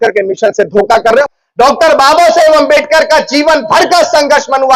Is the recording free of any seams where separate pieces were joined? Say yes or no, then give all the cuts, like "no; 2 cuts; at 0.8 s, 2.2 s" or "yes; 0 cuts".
no; 1 cut; at 1.3 s